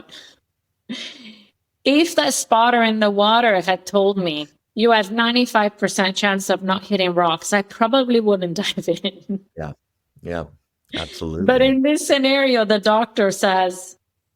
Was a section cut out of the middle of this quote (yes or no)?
no